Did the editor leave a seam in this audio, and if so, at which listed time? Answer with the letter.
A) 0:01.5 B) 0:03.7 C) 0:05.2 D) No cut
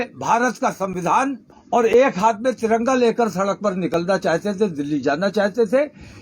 A